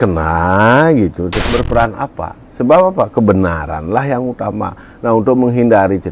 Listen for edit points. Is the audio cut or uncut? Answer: cut